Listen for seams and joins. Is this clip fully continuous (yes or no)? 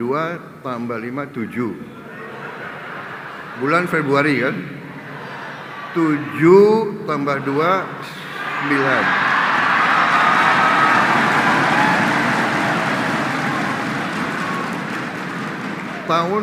yes